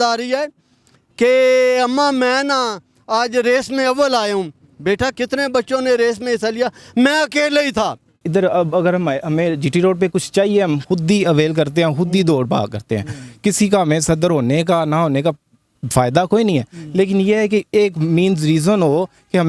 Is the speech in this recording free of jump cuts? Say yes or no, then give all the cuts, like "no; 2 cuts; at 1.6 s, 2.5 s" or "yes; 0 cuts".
no; 2 cuts; at 5.2 s, 8.2 s